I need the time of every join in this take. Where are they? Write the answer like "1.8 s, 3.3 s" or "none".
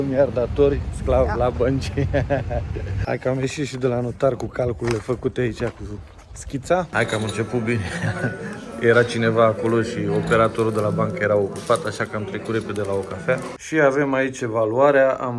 2.9 s, 6.9 s, 13.6 s